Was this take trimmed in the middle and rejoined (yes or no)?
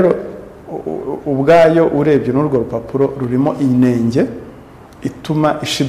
no